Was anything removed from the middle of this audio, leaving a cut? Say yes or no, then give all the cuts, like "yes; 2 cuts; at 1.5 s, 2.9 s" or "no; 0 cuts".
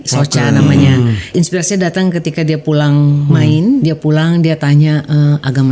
yes; 2 cuts; at 1.3 s, 3.8 s